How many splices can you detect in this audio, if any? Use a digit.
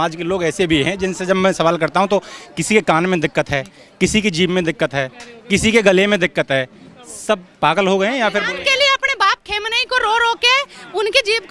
0